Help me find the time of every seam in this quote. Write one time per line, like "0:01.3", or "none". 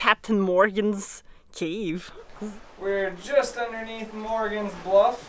0:02.4